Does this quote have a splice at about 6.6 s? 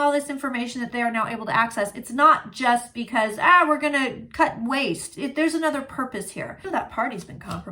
yes; 1 cut; at 6.6 s

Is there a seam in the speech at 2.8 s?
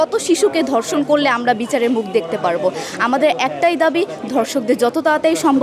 no; 0 cuts

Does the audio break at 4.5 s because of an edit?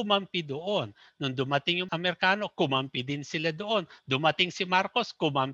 no; 1 cut; at 1.9 s

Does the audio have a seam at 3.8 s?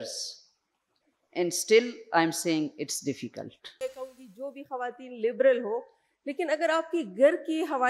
yes; 1 cut; at 3.8 s

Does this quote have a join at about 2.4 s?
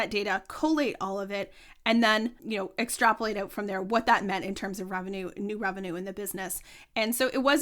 yes; 1 cut; at 2.4 s

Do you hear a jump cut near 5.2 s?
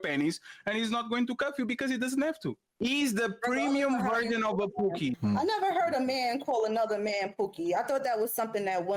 yes; 2 cuts; at 2.6 s, 5.2 s

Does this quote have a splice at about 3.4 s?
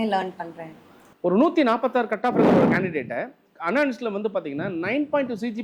no; 1 cut; at 0.9 s

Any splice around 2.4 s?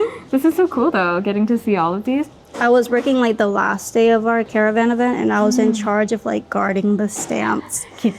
yes; 2 cuts; at 2.4 s, 4.5 s

